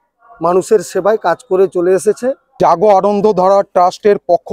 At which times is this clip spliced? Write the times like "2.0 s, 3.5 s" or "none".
2.5 s